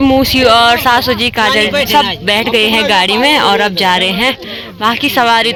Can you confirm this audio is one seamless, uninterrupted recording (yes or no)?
yes